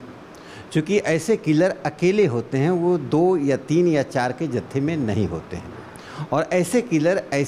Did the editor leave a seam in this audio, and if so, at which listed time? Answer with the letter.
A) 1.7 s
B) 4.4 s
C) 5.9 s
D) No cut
D